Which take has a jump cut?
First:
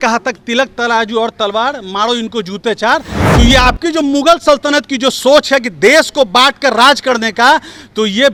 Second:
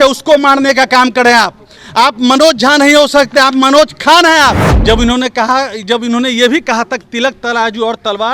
second; 1 cut; at 4.7 s

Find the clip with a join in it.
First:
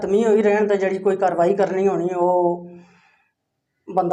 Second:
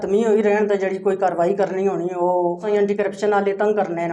second; 1 cut; at 2.6 s

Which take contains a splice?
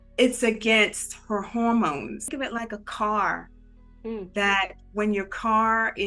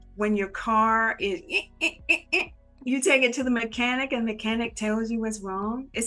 first; 1 cut; at 2.3 s

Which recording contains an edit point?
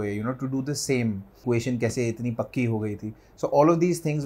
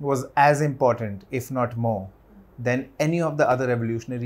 first; 1 cut; at 1.4 s

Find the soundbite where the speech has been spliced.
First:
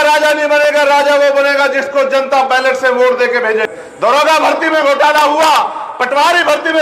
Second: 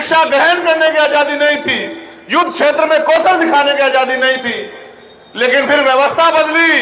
first; 1 cut; at 3.7 s

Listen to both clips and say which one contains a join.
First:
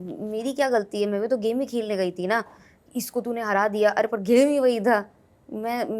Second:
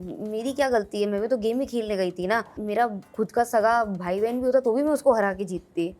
second; 1 cut; at 2.5 s

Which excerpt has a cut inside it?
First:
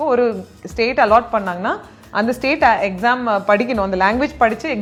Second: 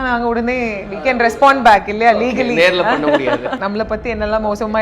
second; 1 cut; at 3.6 s

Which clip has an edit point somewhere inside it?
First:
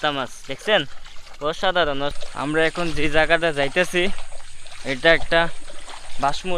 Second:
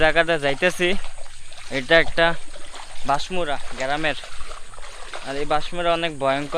first; 1 cut; at 2.1 s

